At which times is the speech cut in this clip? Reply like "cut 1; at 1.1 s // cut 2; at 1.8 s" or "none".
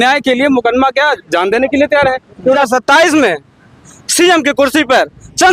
cut 1; at 2.6 s